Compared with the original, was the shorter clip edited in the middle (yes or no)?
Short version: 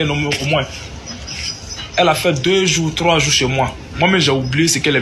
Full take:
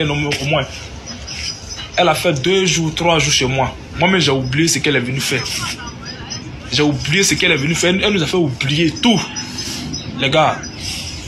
no